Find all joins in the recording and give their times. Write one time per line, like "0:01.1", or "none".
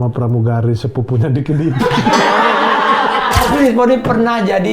0:03.5